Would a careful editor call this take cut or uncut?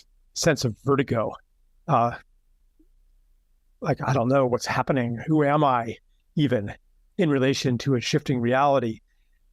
uncut